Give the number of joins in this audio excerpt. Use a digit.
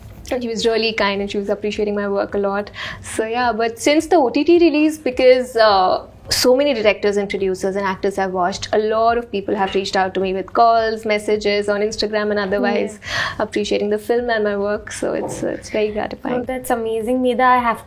0